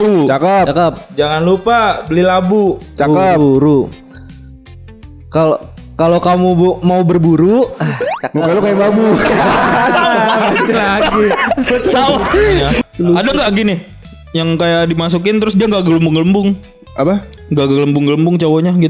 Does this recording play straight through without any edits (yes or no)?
no